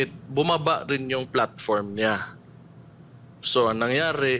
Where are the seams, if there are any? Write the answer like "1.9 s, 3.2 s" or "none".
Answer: none

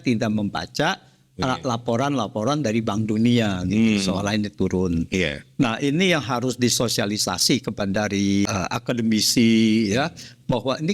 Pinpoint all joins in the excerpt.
8.5 s

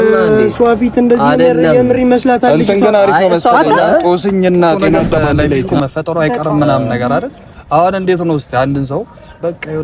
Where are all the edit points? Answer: 5.7 s

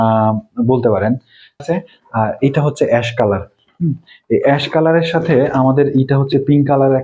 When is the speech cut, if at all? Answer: 1.6 s

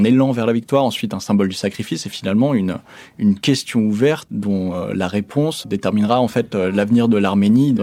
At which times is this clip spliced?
none

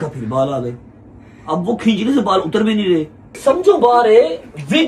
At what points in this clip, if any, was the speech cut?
3.2 s

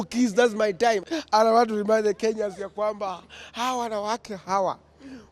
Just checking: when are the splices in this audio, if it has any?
1.0 s

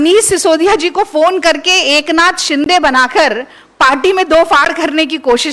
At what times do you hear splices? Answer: none

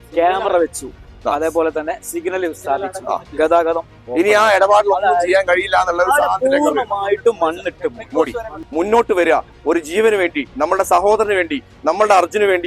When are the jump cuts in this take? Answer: 8.6 s

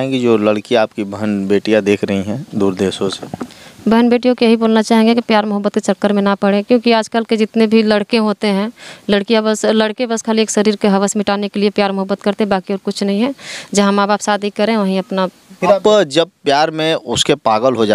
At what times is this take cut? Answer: 15.8 s

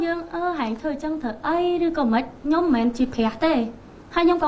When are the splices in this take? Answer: none

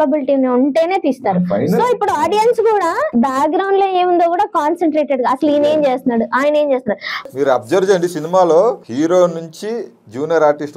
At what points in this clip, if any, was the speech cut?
3.1 s, 7.3 s, 8.9 s

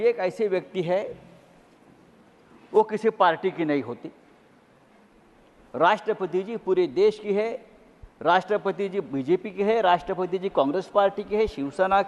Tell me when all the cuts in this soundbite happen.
none

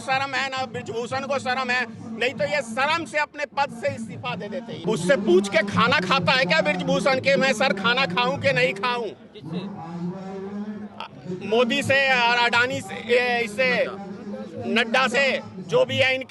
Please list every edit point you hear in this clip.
4.8 s

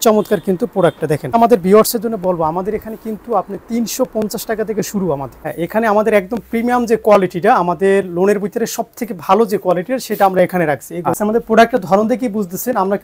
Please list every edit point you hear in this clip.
1.3 s, 5.4 s, 11.1 s

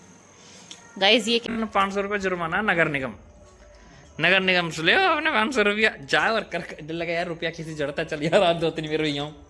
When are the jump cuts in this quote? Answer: 1.5 s

